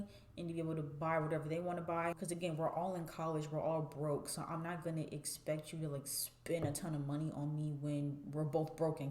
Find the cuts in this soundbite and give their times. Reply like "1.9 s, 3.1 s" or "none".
2.2 s